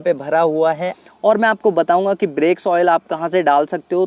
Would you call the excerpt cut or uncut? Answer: cut